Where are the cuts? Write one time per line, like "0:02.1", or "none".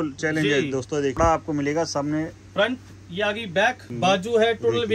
0:01.1